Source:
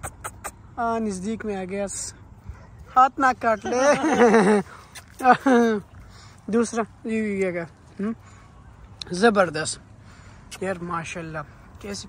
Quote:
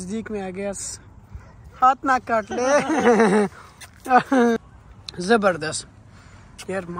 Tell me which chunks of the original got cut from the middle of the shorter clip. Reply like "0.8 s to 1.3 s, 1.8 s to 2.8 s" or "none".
5.7 s to 8.5 s